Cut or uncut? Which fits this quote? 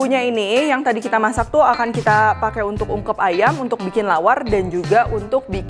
uncut